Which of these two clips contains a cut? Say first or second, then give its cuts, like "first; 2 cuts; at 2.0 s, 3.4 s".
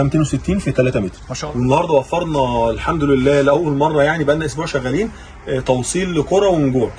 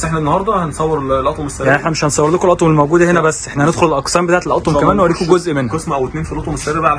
first; 1 cut; at 1.2 s